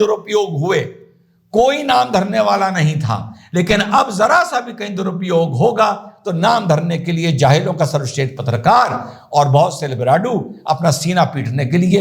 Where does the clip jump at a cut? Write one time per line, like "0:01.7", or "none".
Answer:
none